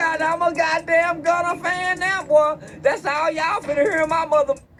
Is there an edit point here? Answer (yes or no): no